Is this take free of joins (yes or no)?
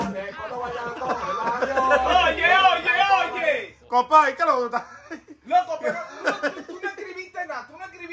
yes